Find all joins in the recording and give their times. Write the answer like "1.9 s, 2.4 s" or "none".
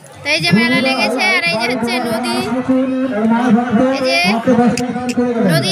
none